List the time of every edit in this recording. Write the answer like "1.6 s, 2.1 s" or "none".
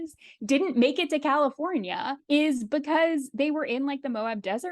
none